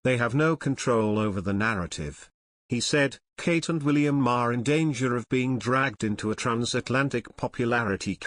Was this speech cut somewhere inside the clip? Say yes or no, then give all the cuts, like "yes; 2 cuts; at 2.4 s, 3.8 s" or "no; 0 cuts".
no; 0 cuts